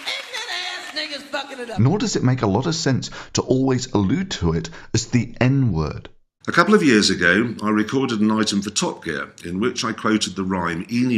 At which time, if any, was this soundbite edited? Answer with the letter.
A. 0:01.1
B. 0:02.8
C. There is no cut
A